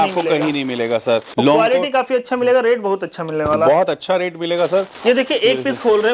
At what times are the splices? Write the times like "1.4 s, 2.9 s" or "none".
1.3 s, 4.9 s